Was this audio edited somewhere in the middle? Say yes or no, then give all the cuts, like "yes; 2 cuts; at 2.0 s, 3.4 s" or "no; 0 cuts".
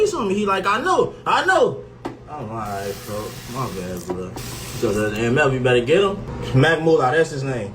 yes; 1 cut; at 1.6 s